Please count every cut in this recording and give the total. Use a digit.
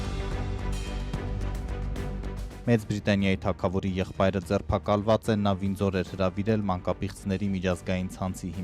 1